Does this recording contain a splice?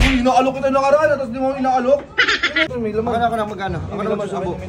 yes; 1 cut; at 2.7 s

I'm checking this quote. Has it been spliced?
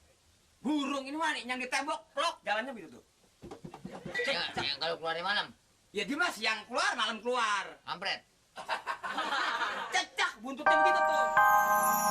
yes; 1 cut; at 10.7 s

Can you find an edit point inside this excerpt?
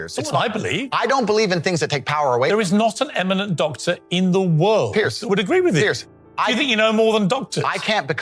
no; 0 cuts

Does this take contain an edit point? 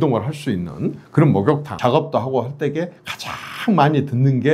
yes; 1 cut; at 1.7 s

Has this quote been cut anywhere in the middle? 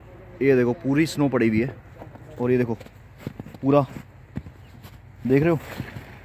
no; 0 cuts

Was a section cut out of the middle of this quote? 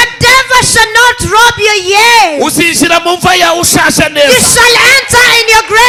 no; 0 cuts

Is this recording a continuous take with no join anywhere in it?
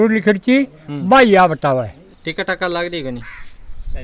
yes; 0 cuts

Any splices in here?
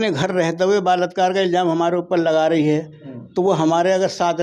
no; 0 cuts

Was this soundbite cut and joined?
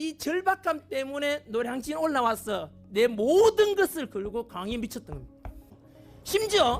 yes; 1 cut; at 5.7 s

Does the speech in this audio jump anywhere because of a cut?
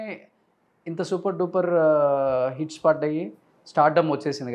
no; 0 cuts

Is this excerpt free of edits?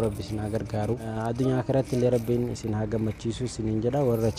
no; 1 cut; at 1.1 s

